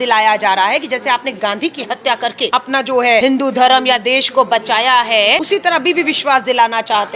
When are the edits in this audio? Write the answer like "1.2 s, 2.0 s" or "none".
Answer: 2.5 s, 3.2 s, 5.4 s